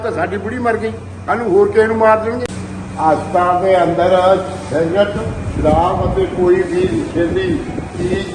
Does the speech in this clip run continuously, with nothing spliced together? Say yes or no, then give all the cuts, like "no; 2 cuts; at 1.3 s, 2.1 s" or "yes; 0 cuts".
no; 1 cut; at 2.8 s